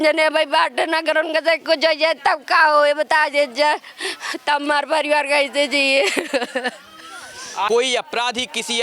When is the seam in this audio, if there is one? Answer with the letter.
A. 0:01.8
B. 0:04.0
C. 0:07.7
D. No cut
C